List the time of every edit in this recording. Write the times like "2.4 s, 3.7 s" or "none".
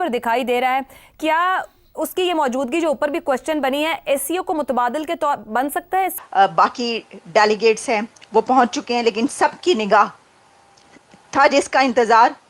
6.2 s